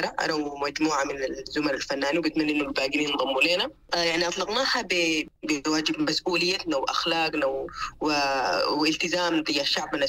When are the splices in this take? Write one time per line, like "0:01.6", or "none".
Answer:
0:03.9
0:05.3